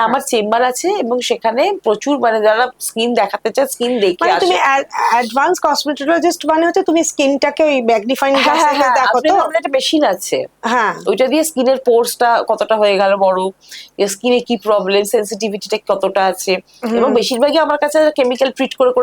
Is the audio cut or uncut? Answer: uncut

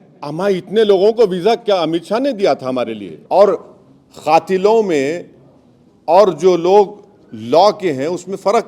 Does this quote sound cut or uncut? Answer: cut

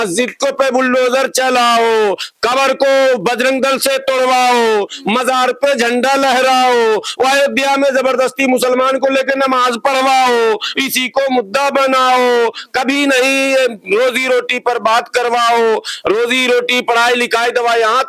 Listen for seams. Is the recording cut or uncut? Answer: uncut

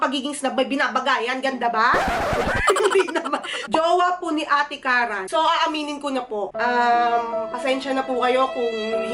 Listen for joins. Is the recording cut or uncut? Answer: cut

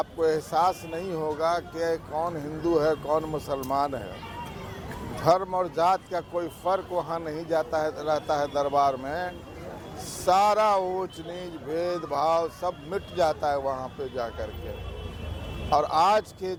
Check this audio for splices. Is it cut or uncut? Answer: uncut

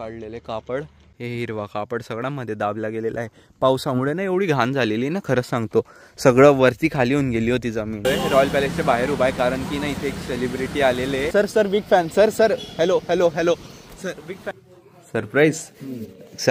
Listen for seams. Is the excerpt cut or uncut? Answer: cut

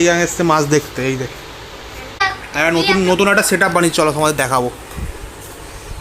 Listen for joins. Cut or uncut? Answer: cut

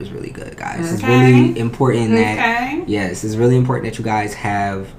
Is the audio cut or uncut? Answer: uncut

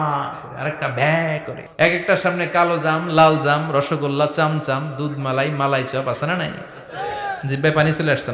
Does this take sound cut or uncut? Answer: cut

